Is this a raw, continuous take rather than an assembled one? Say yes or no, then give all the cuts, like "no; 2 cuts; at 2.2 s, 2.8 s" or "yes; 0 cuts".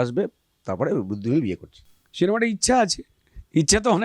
yes; 0 cuts